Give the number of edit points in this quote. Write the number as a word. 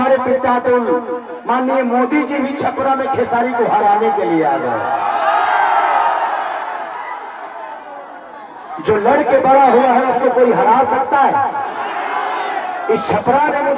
zero